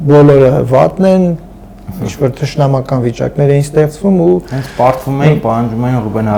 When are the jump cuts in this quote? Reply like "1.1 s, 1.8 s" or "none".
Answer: none